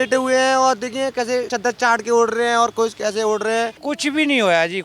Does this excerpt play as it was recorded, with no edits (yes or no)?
no